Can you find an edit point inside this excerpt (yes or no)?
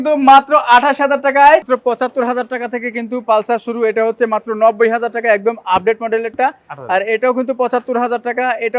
yes